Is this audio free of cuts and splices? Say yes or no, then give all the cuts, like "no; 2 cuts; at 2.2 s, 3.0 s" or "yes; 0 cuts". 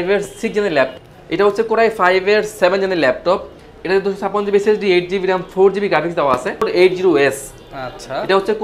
no; 2 cuts; at 0.9 s, 6.6 s